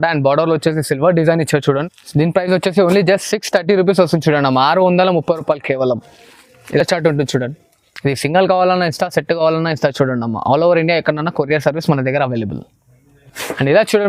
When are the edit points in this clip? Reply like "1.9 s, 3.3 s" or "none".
none